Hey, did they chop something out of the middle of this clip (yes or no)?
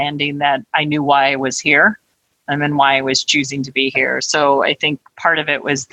no